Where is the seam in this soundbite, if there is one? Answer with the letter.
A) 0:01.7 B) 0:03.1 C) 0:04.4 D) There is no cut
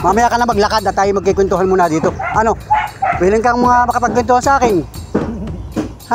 D